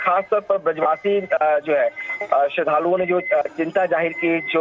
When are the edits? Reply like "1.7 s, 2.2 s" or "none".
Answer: none